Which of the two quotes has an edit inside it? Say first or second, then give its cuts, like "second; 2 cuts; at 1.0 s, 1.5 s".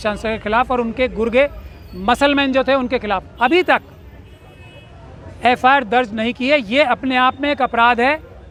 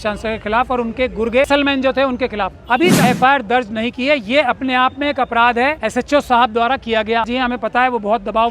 second; 4 cuts; at 1.5 s, 3.0 s, 5.8 s, 7.3 s